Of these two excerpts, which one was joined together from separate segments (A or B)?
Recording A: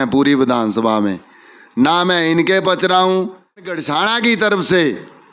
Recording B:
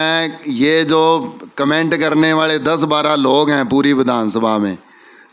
A